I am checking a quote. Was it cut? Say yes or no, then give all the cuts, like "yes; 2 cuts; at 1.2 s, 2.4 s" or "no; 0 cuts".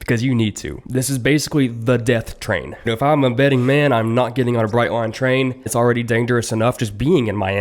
yes; 1 cut; at 2.9 s